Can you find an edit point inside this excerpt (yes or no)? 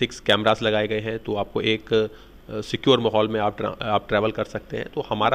no